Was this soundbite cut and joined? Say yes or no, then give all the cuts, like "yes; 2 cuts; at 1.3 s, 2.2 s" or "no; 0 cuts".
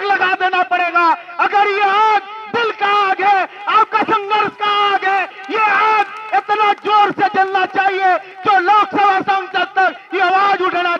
no; 0 cuts